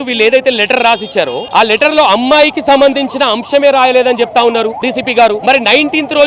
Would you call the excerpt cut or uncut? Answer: cut